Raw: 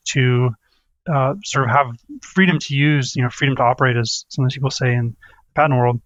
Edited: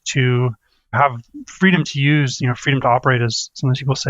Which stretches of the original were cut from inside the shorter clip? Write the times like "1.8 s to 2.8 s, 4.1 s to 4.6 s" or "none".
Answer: 0.9 s to 1.7 s